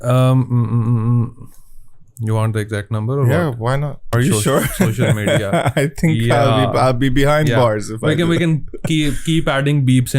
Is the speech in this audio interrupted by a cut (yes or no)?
yes